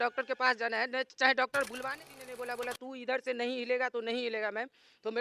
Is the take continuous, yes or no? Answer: no